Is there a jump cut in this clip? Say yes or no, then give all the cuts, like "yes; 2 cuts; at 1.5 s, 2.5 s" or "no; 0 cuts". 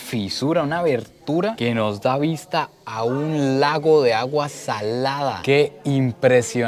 no; 0 cuts